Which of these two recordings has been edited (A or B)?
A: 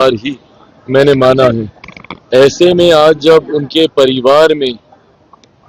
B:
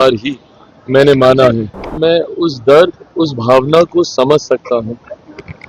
B